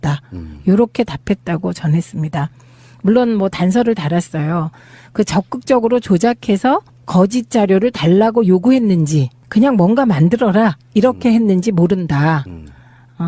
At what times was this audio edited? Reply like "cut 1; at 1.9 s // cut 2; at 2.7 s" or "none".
cut 1; at 5.4 s